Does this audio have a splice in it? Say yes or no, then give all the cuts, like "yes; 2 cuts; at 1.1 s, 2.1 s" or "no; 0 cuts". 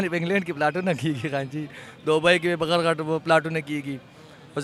no; 0 cuts